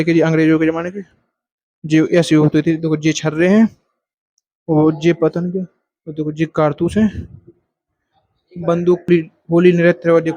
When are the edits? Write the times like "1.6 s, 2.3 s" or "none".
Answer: 9.1 s